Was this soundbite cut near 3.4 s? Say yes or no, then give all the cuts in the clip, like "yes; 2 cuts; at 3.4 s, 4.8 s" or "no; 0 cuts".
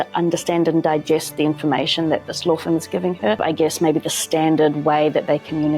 yes; 1 cut; at 3.4 s